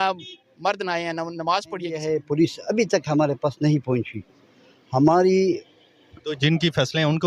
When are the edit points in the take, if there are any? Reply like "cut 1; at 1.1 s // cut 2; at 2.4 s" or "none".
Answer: cut 1; at 2.0 s

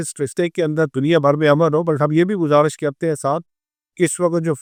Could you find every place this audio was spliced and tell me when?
none

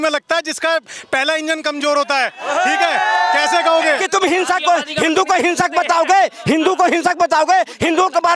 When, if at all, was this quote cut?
cut 1; at 4.0 s

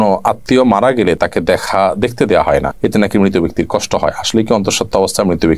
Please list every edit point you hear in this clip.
none

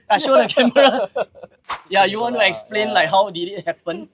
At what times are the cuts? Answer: cut 1; at 1.7 s

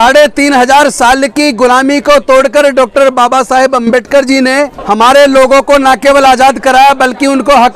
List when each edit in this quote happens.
cut 1; at 4.8 s

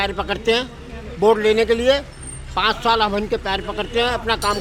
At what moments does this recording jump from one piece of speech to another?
none

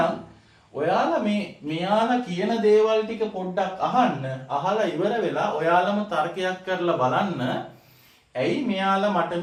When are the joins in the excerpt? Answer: none

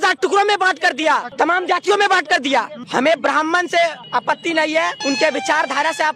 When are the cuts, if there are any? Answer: cut 1; at 1.3 s // cut 2; at 2.8 s // cut 3; at 4.0 s // cut 4; at 5.0 s

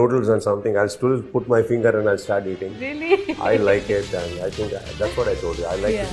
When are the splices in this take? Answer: none

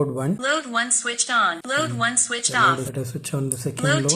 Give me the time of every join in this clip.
cut 1; at 1.6 s // cut 2; at 2.9 s

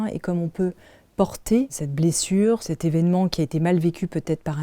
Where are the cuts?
cut 1; at 1.8 s // cut 2; at 2.6 s

